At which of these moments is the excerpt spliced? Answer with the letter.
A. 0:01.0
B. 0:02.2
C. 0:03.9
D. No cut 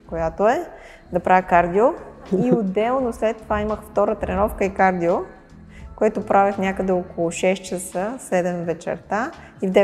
B